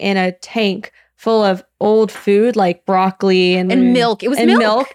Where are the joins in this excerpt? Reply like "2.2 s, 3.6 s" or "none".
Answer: 3.7 s